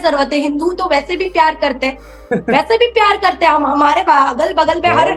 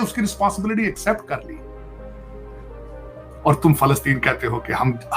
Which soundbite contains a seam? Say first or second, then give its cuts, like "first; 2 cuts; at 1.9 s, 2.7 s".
second; 2 cuts; at 1.7 s, 3.2 s